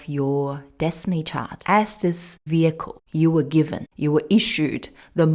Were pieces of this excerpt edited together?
yes; 4 cuts; at 1.5 s, 2.3 s, 2.9 s, 3.8 s

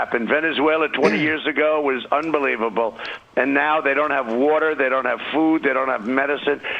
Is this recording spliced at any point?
no; 0 cuts

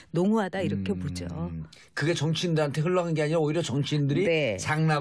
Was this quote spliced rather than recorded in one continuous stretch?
yes; 1 cut; at 2.7 s

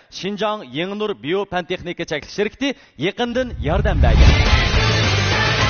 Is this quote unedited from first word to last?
no; 1 cut; at 4.1 s

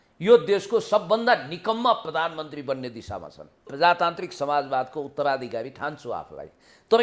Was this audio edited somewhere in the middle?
yes; 1 cut; at 3.7 s

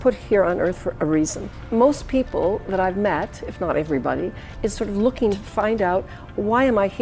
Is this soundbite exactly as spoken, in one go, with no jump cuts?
no; 2 cuts; at 1.5 s, 5.4 s

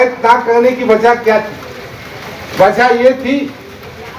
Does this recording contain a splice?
no; 0 cuts

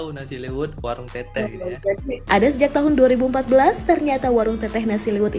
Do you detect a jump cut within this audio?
yes; 1 cut; at 2.1 s

